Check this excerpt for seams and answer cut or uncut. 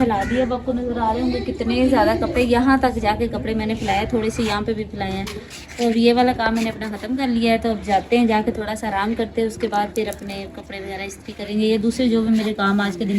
uncut